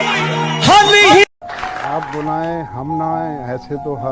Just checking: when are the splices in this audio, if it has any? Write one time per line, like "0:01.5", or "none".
0:01.3

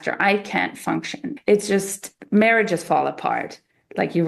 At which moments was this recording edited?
0:01.2

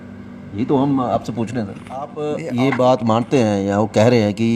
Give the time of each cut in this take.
0:02.2

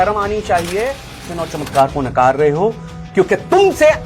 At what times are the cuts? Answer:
0:01.3

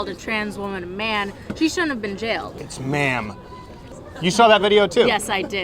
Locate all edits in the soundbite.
0:02.5
0:03.9

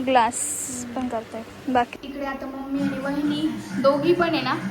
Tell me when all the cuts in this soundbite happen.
0:02.0

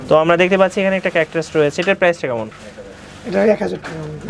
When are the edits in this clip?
none

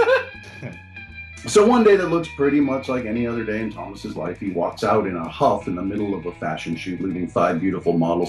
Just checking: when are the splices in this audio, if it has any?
none

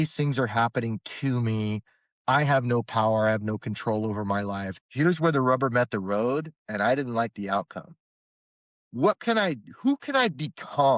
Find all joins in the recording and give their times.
0:04.7

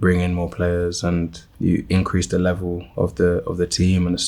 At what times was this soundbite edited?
0:01.4

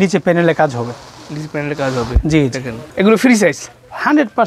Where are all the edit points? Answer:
none

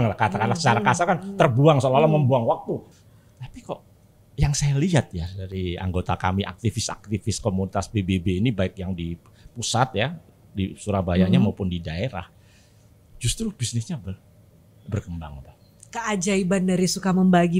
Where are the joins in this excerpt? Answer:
0:02.9

